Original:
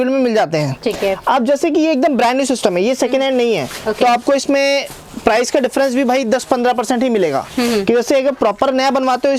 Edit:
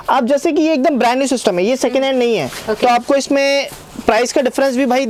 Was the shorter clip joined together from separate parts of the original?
no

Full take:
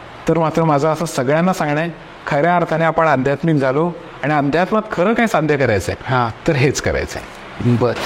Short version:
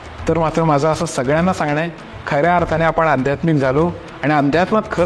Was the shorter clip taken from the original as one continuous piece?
yes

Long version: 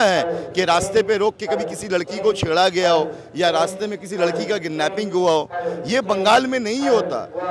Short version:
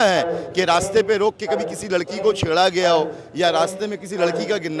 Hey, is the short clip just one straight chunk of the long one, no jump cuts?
yes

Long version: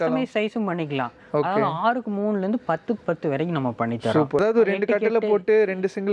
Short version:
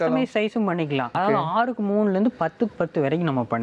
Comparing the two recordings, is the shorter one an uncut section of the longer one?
no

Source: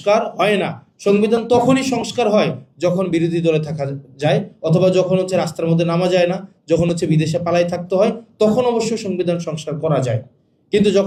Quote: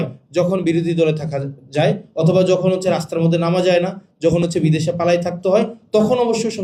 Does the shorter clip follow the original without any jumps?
yes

